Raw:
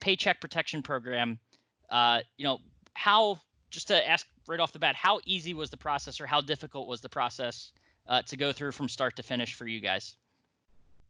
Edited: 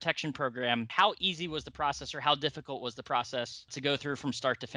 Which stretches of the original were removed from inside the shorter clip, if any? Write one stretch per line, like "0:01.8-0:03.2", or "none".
0:01.4-0:05.0
0:07.8-0:08.3